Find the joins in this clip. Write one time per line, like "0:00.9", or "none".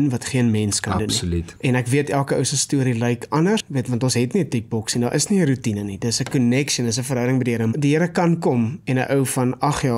0:01.5
0:03.7
0:07.7